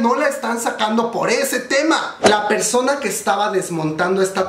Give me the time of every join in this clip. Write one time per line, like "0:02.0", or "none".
0:02.1